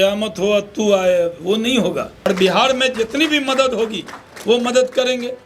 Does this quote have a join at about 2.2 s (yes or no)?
yes